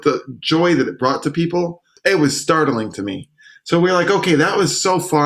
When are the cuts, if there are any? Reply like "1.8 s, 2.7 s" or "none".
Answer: 1.8 s